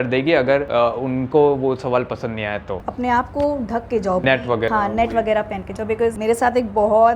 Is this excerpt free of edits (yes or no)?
no